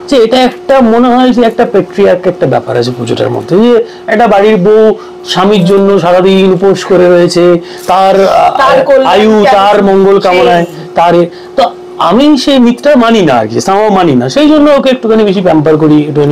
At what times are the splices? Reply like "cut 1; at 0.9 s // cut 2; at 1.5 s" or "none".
none